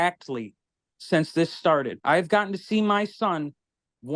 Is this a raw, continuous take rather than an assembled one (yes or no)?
no